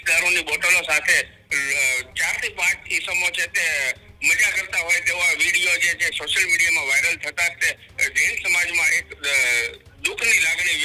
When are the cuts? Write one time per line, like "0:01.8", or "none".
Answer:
none